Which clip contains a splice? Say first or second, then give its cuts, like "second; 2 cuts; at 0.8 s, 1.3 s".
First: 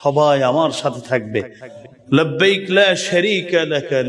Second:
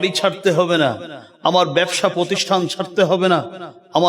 first; 1 cut; at 1.6 s